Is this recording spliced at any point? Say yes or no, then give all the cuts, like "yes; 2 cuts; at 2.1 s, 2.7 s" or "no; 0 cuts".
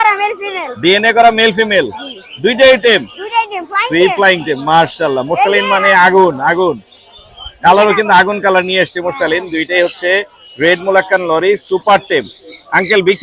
no; 0 cuts